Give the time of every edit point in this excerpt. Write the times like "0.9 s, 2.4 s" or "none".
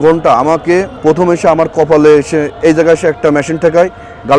0.9 s